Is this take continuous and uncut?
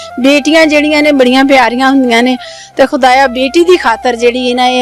yes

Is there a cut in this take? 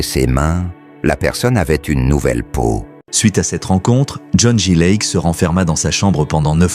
yes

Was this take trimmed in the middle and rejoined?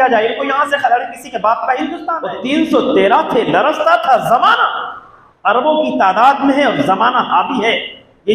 yes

